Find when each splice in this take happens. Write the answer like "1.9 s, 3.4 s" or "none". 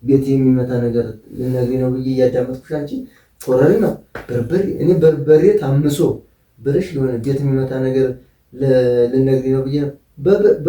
none